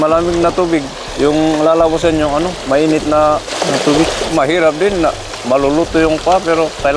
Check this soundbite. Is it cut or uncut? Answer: cut